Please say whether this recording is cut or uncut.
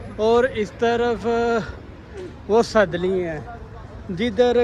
uncut